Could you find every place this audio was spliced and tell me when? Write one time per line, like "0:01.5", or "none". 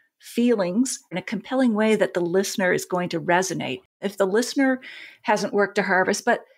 0:01.2
0:04.0

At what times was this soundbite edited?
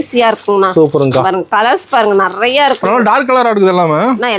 none

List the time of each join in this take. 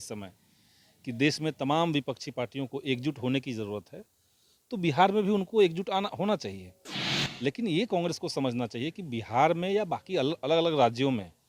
none

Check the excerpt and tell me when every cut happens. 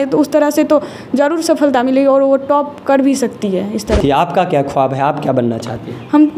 0:04.0

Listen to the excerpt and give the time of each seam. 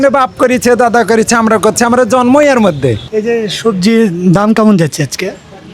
0:03.1

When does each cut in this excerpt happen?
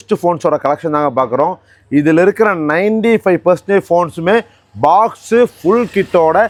none

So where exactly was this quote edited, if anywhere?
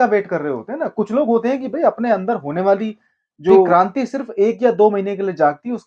0:03.7

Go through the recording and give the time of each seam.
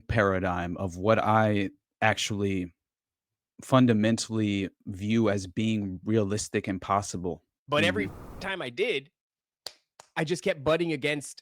0:07.5

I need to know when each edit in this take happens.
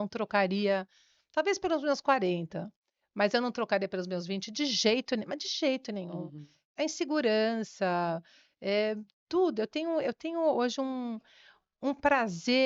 none

